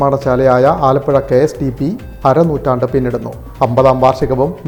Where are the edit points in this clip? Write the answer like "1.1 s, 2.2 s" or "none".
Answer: none